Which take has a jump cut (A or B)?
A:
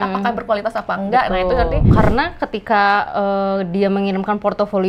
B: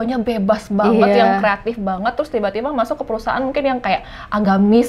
A